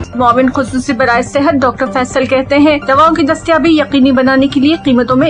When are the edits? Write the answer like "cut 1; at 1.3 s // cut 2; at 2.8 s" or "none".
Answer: none